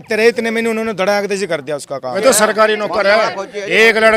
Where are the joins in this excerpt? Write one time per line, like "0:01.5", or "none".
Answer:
0:02.0